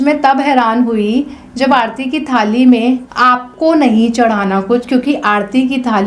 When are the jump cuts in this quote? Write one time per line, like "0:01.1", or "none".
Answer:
0:03.5